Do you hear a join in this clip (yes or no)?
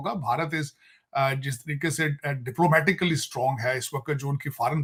no